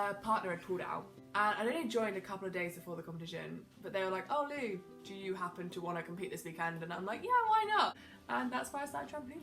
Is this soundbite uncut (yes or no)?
no